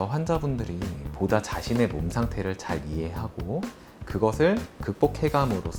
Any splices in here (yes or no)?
no